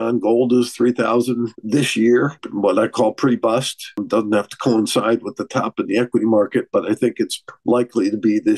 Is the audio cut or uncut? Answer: cut